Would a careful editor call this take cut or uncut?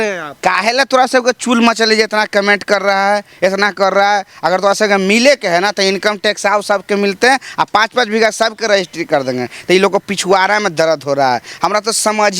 uncut